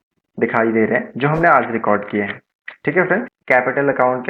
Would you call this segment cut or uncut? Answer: cut